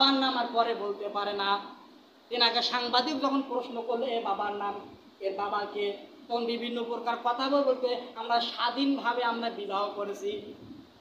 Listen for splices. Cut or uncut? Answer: uncut